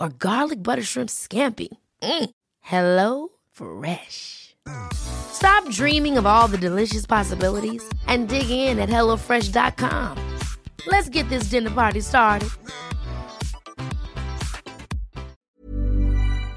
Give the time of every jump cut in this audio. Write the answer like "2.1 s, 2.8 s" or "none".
15.4 s

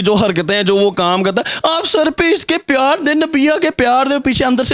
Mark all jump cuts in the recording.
none

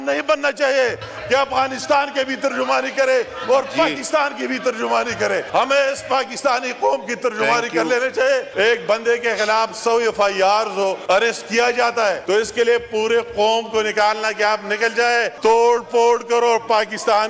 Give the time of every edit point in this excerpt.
5.5 s, 8.5 s, 11.0 s, 12.2 s, 15.3 s

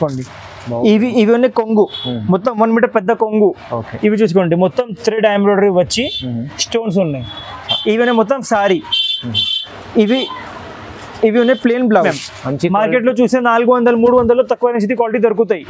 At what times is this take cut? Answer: 12.1 s

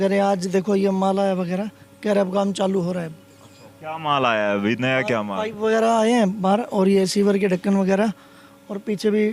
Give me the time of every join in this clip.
none

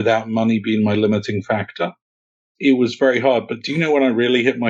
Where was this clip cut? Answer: 2.4 s

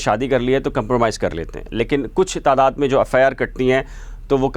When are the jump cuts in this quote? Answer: none

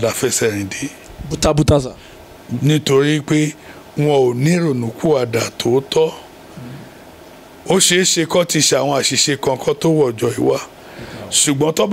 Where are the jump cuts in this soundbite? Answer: none

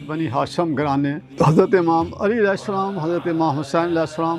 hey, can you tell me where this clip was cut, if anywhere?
1.2 s

